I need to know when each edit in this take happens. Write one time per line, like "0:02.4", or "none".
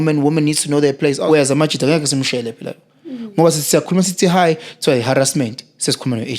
0:01.2